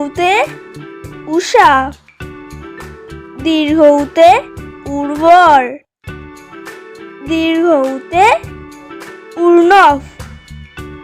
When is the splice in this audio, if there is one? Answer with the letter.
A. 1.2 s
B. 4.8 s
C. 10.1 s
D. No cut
C